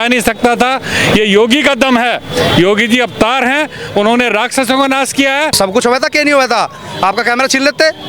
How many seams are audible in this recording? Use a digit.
1